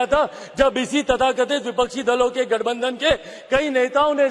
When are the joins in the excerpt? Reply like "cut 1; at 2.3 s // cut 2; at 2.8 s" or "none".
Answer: none